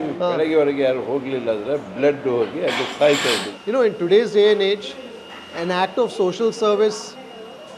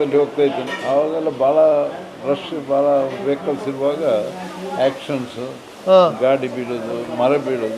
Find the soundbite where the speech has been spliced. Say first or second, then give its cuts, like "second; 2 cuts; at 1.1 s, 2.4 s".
first; 1 cut; at 3.5 s